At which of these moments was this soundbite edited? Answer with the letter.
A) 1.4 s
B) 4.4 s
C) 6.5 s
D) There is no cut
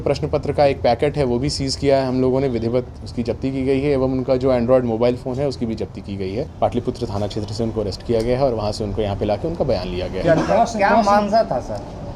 C